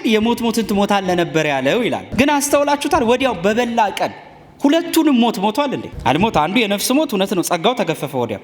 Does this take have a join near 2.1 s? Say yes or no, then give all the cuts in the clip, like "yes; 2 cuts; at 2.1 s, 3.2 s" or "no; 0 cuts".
yes; 2 cuts; at 2.1 s, 5.9 s